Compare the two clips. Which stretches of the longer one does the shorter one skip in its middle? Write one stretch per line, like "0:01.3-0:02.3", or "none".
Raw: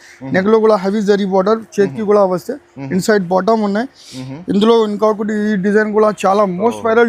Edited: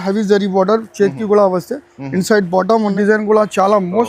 0:03.7-0:05.6